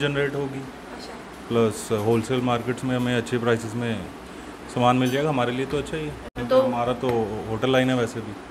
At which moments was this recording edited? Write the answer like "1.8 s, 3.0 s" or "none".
none